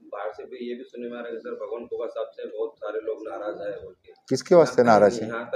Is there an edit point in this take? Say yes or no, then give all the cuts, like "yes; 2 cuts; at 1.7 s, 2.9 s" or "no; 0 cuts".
no; 0 cuts